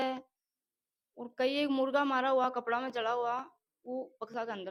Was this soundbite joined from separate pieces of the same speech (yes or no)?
no